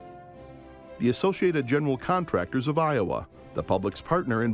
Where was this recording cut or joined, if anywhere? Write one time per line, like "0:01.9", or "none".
0:01.0